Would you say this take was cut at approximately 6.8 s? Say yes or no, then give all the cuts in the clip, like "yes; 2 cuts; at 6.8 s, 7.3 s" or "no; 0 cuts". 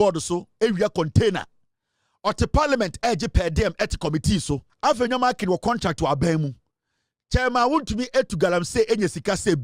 no; 1 cut; at 4.7 s